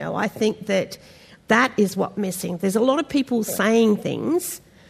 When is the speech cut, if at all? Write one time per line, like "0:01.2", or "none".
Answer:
0:01.4